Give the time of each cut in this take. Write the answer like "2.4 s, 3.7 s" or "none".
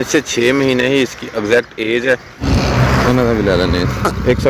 2.3 s